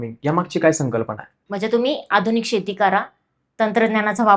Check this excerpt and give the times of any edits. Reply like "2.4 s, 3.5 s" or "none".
1.4 s